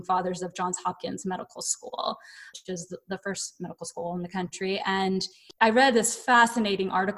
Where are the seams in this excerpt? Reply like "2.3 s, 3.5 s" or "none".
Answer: 2.5 s, 5.4 s